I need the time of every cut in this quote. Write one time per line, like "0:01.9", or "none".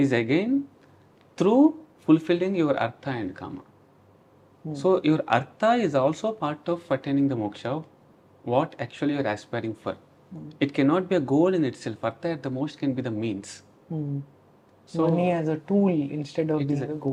none